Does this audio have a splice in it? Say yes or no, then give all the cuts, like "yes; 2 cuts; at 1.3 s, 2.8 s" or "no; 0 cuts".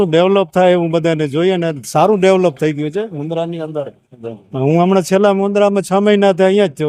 no; 0 cuts